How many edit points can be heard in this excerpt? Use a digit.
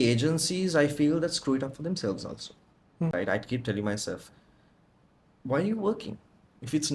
1